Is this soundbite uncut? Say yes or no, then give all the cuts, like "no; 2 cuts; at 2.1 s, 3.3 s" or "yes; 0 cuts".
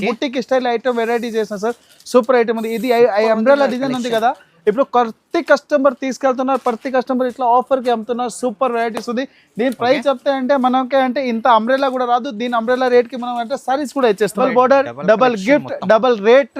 no; 1 cut; at 14.4 s